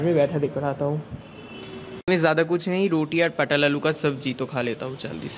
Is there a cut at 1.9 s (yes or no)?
yes